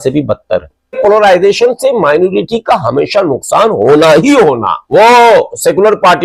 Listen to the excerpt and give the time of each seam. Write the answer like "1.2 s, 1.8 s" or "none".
1.0 s, 4.7 s